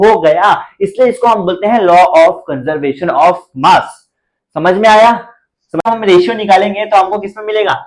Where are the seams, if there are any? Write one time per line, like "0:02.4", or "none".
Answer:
0:05.9